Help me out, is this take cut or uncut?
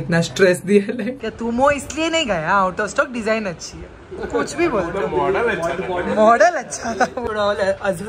cut